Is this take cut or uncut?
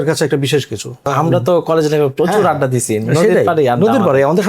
cut